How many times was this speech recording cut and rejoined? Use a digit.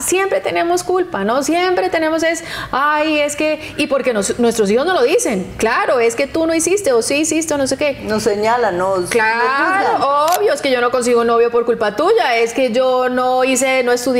0